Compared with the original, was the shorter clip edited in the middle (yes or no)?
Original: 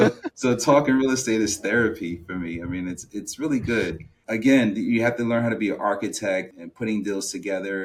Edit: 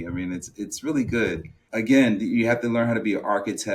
no